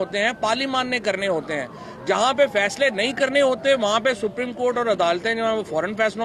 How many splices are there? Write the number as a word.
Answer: zero